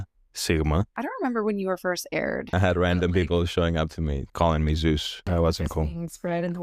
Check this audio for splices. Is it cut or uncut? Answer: cut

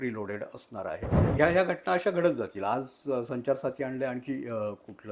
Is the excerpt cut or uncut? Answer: cut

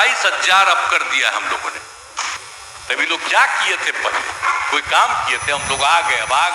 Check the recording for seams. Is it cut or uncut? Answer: cut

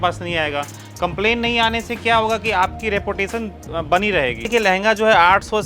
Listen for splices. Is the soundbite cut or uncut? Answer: cut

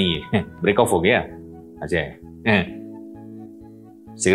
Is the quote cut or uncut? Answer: uncut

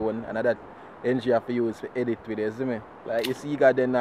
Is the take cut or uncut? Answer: cut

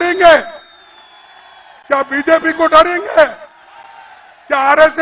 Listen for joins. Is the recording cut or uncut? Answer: uncut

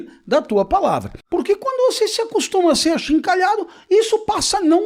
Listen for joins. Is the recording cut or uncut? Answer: cut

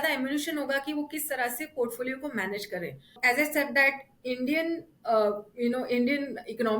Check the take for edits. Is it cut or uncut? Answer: cut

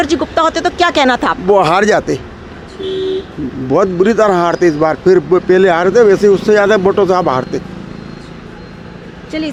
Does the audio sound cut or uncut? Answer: uncut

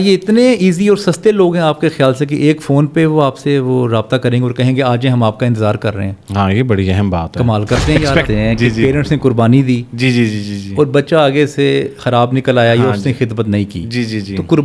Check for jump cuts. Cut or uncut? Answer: cut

